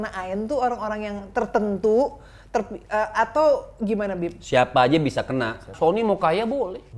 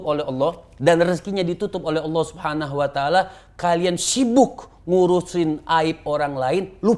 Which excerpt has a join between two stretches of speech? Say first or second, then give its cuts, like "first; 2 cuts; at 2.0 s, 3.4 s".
first; 1 cut; at 5.7 s